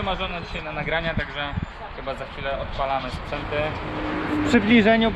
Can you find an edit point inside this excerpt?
no; 0 cuts

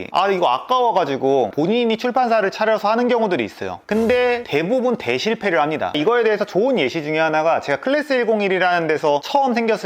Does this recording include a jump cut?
no; 0 cuts

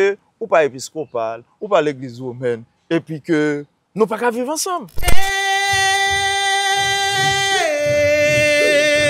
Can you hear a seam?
yes; 1 cut; at 4.9 s

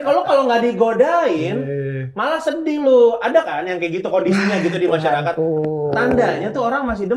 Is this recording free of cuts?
yes; 0 cuts

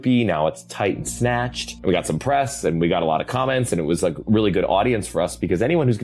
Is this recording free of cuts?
no; 1 cut; at 1.7 s

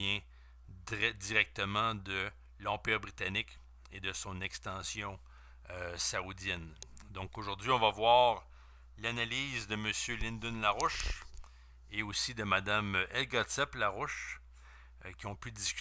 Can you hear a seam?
no; 0 cuts

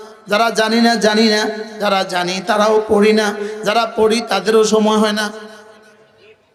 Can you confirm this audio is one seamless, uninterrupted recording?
yes; 0 cuts

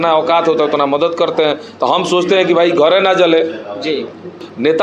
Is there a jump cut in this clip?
no; 0 cuts

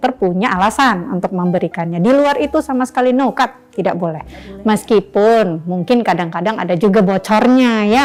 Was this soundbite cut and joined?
no; 0 cuts

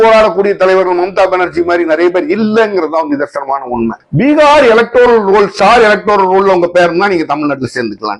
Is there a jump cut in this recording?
yes; 1 cut; at 4.0 s

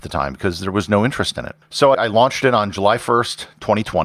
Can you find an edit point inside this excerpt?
yes; 1 cut; at 1.9 s

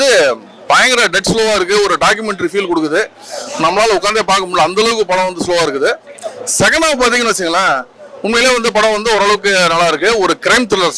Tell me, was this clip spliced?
no; 0 cuts

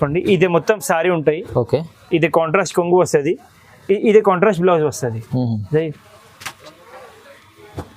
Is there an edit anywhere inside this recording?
no; 0 cuts

